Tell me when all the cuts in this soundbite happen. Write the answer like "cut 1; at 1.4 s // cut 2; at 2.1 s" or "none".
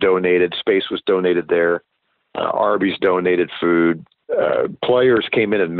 cut 1; at 4.1 s